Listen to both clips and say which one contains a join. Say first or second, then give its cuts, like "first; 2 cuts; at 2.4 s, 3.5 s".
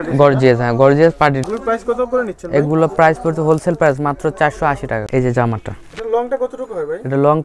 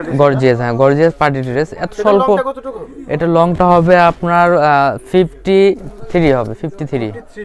first; 2 cuts; at 1.4 s, 5.0 s